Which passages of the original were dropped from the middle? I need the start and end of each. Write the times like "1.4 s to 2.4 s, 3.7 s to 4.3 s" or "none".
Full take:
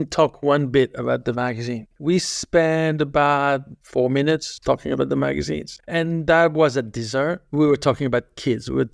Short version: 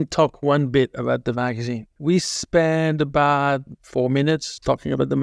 none